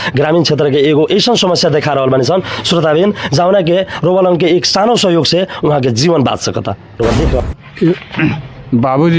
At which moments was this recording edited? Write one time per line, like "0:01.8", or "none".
0:07.4